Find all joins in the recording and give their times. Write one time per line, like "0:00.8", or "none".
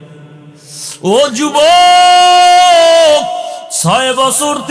0:03.6